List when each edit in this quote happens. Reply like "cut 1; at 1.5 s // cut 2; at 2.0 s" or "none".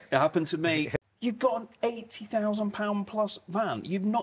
cut 1; at 1.0 s